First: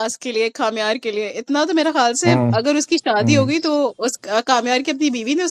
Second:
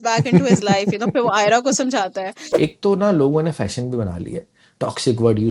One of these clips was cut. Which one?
second; 1 cut; at 2.4 s

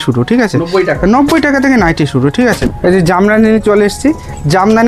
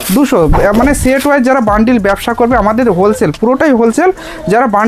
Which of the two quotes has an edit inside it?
first; 1 cut; at 2.8 s

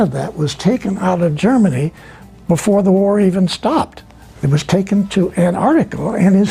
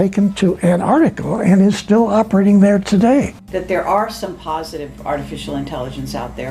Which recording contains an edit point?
second; 1 cut; at 3.4 s

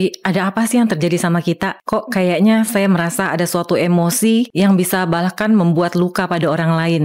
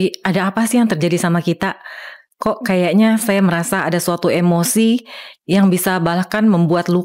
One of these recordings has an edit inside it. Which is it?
first; 2 cuts; at 1.7 s, 4.5 s

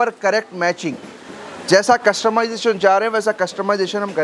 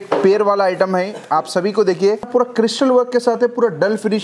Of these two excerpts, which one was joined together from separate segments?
second; 1 cut; at 2.3 s

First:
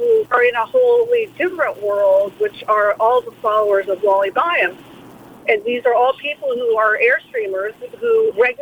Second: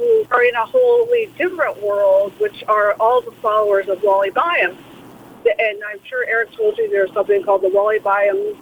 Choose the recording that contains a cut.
first; 1 cut; at 5.3 s

